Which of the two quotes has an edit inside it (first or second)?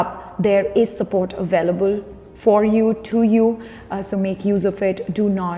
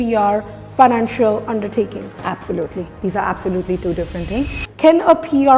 second